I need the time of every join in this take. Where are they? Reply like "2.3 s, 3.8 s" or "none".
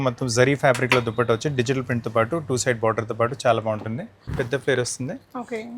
4.2 s